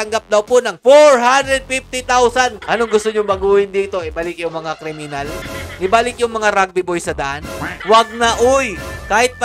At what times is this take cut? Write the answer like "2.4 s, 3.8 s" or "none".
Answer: 2.6 s, 5.4 s, 7.7 s